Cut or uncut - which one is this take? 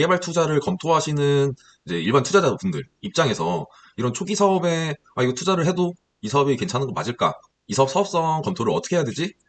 uncut